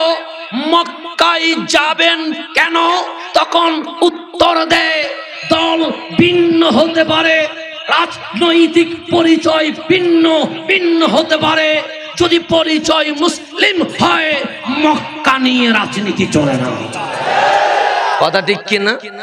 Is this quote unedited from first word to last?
yes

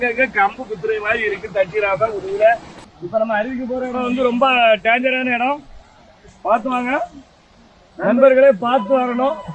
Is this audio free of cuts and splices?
no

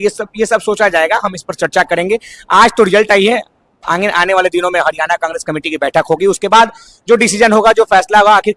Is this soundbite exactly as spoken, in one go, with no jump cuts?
yes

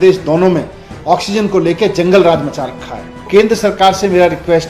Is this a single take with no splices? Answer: no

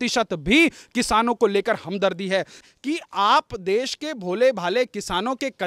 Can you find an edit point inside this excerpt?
yes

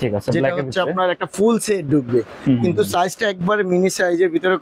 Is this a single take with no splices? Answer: yes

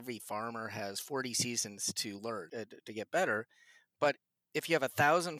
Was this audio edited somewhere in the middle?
yes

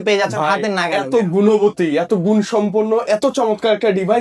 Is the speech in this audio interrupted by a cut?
no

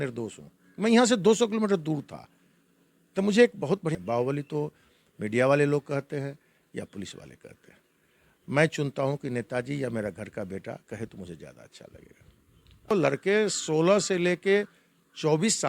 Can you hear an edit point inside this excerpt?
yes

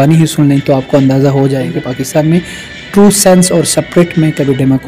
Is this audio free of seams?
no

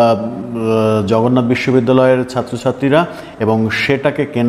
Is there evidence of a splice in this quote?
no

